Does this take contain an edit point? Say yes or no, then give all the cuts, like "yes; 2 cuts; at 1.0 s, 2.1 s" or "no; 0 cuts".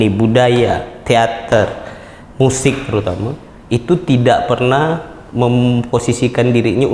no; 0 cuts